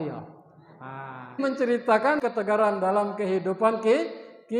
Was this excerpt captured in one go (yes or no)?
no